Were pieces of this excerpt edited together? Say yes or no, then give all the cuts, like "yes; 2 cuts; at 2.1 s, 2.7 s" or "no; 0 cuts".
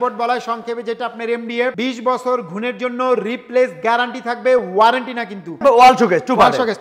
yes; 2 cuts; at 1.8 s, 5.6 s